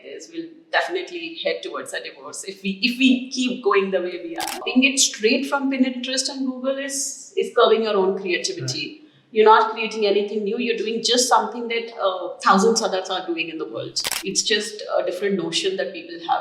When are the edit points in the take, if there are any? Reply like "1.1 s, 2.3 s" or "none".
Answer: 4.6 s, 14.0 s